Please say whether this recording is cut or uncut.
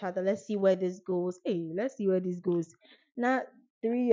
uncut